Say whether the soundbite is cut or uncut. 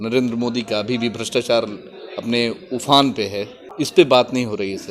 cut